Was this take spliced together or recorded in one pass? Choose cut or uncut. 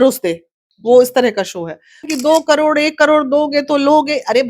cut